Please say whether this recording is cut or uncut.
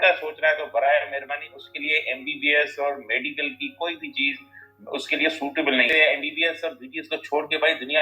cut